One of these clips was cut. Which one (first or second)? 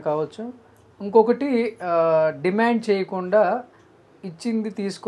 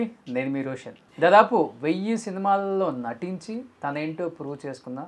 second